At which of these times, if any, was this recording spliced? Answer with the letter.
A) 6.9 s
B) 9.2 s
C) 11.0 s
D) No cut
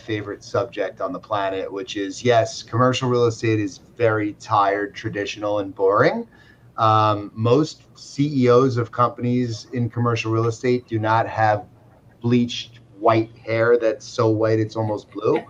D